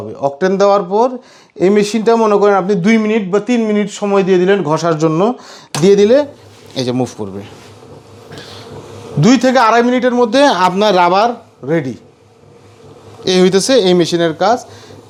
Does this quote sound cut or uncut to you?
uncut